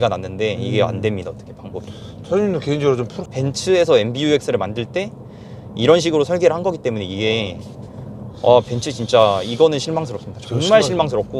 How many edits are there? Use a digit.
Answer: 1